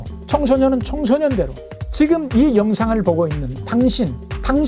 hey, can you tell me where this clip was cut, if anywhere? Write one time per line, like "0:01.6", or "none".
none